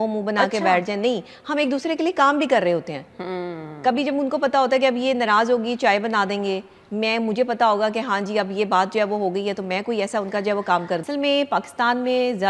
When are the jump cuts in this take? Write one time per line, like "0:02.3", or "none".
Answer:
0:11.0